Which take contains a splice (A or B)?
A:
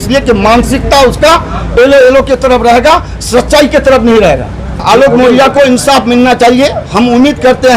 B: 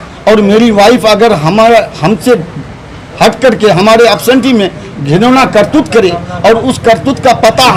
A